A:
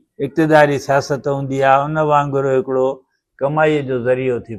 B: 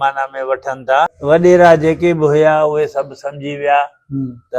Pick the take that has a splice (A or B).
B